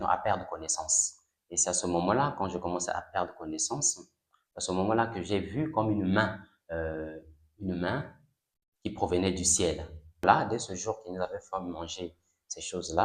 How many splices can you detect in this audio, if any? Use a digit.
1